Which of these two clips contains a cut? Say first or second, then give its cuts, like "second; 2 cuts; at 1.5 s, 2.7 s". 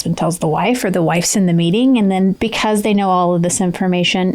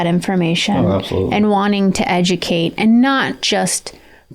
first; 1 cut; at 2.4 s